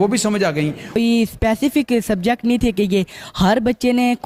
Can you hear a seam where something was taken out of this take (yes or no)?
yes